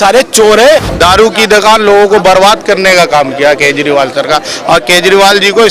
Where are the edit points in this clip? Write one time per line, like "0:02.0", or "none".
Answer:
0:00.9